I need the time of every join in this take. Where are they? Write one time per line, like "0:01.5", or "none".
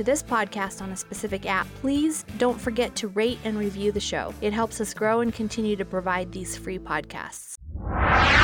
0:07.5